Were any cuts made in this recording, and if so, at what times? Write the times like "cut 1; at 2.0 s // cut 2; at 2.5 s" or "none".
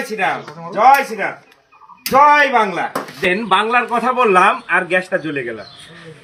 none